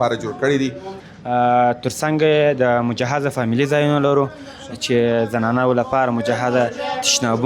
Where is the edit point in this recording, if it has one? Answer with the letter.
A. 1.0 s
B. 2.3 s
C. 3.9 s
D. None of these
A